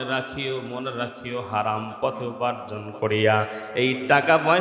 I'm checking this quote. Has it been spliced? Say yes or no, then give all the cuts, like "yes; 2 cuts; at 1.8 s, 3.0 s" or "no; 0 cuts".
no; 0 cuts